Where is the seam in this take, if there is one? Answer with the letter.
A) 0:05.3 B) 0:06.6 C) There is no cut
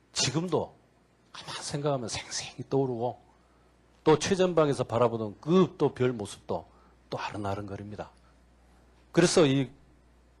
A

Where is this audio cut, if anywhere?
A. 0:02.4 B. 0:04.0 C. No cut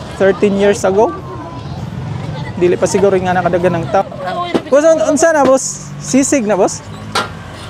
B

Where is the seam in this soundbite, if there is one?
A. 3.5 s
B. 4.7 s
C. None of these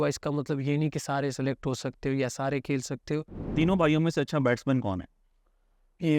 A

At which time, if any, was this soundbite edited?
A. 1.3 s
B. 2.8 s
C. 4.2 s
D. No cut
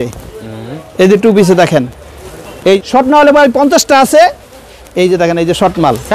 B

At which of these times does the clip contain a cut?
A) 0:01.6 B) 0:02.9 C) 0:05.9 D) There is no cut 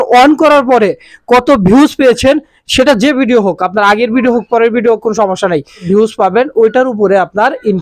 C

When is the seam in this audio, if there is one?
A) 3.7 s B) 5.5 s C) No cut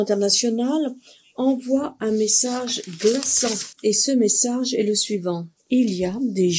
A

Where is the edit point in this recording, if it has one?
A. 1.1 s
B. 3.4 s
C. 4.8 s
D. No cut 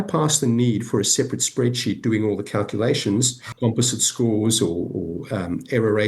B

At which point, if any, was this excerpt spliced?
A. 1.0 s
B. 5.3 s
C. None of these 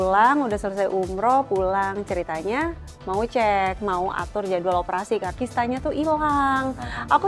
B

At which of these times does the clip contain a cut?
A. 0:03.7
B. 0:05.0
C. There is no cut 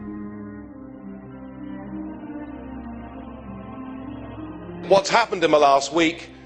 A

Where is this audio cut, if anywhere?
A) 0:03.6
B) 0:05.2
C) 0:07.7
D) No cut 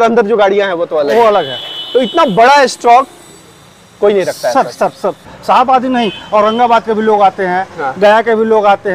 B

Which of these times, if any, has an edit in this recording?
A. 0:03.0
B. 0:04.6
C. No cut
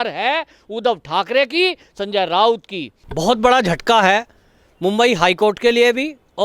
A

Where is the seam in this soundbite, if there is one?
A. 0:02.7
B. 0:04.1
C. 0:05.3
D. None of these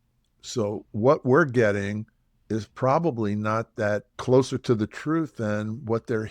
B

